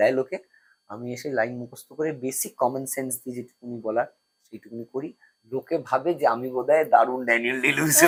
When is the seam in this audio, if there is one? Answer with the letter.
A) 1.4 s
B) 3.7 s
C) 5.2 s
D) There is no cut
D